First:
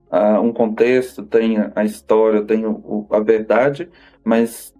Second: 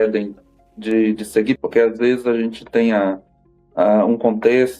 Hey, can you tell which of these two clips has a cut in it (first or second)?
second